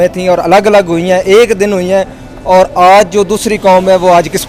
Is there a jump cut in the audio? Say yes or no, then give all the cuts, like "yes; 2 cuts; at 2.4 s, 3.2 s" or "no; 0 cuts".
no; 0 cuts